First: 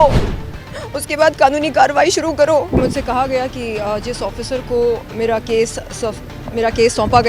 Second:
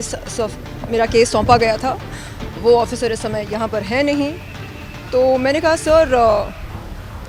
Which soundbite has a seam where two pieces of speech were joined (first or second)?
first